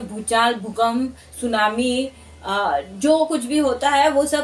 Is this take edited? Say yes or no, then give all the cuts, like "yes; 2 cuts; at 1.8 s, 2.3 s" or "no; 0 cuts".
no; 0 cuts